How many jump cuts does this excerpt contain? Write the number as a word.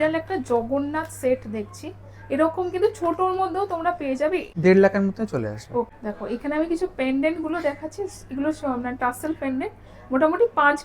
two